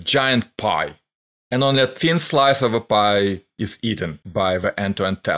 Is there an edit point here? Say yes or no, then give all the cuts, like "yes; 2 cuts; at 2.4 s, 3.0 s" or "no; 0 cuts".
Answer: yes; 1 cut; at 4.2 s